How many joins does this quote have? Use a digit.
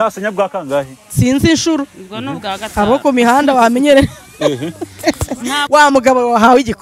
1